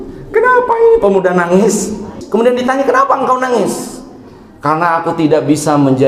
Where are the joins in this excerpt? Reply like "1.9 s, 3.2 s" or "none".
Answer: 2.1 s